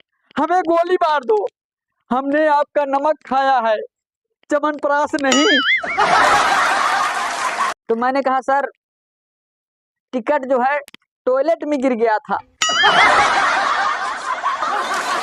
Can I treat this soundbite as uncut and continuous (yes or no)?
no